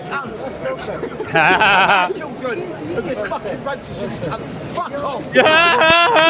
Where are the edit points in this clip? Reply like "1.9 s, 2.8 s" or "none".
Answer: none